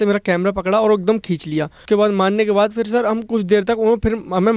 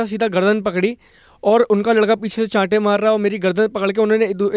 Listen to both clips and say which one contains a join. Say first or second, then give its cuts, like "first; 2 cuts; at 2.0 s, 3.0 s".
first; 1 cut; at 1.8 s